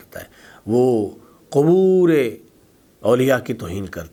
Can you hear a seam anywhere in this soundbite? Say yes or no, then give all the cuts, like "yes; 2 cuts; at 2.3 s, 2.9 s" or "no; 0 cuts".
no; 0 cuts